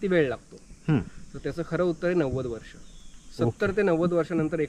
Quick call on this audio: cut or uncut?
uncut